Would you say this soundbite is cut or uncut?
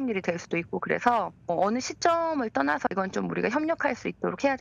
cut